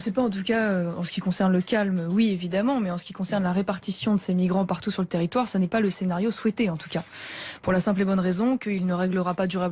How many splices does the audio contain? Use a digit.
1